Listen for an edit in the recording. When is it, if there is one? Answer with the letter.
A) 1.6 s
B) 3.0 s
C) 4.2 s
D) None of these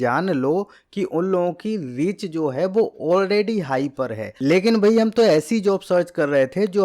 C